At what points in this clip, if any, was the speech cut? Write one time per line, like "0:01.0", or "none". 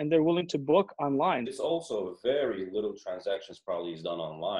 0:01.5